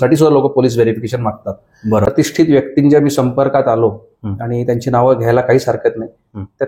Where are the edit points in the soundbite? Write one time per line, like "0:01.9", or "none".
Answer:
0:02.0